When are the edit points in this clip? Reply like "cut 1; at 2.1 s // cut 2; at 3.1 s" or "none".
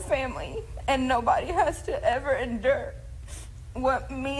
none